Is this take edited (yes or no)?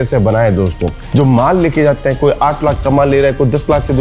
yes